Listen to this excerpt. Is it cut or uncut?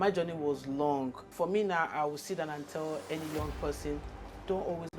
cut